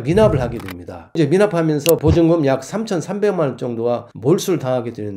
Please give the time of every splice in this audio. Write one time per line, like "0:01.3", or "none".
0:04.1